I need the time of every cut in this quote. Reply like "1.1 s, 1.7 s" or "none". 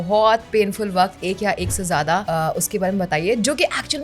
2.2 s

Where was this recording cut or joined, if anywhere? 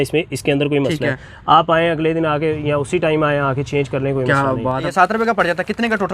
4.9 s

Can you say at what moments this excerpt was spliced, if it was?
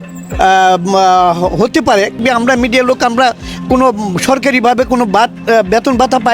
2.1 s

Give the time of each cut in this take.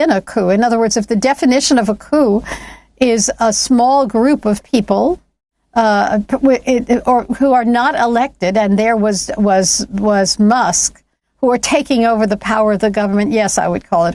none

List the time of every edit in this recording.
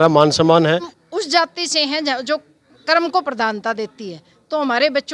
1.0 s

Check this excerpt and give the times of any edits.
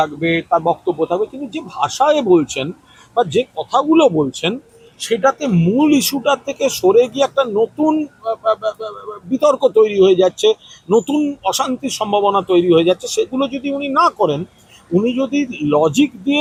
none

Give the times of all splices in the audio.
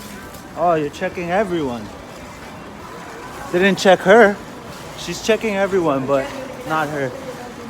none

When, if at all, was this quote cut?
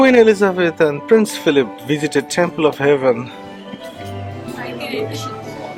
none

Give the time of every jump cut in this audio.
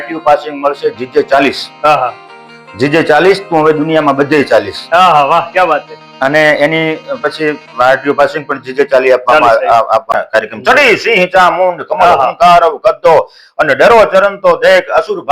10.1 s

